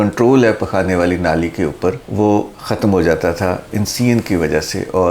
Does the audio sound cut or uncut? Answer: uncut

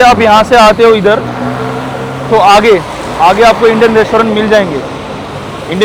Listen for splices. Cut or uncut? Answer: uncut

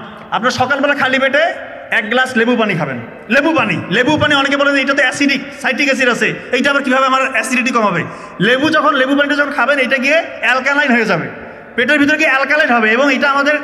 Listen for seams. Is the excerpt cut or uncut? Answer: uncut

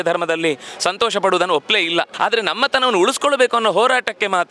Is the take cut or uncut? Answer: cut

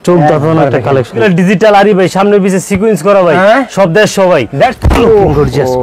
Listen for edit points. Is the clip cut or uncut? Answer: cut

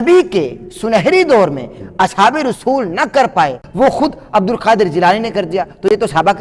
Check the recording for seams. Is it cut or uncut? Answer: cut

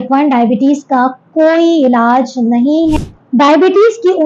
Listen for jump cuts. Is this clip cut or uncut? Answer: cut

